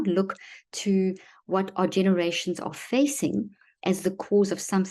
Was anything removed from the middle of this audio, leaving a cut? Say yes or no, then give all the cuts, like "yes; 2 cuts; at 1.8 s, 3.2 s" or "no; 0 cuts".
no; 0 cuts